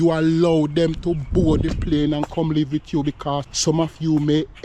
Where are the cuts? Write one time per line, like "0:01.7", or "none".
0:03.5